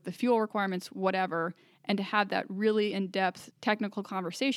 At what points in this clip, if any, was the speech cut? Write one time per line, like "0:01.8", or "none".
0:03.5